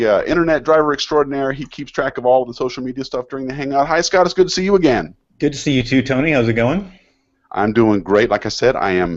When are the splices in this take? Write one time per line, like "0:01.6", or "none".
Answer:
0:01.9